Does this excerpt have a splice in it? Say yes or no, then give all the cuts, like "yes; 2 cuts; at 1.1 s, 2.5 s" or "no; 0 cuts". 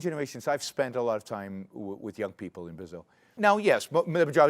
yes; 1 cut; at 3.3 s